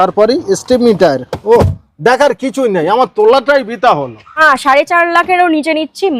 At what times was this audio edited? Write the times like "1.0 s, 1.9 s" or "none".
4.4 s